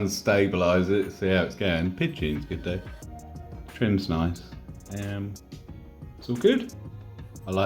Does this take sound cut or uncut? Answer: uncut